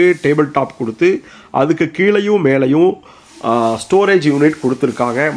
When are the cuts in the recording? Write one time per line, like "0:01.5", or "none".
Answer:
none